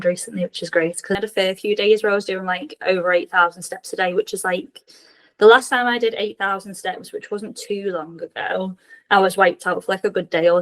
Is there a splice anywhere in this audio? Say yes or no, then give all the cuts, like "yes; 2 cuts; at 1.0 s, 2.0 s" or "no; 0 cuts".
yes; 1 cut; at 1.2 s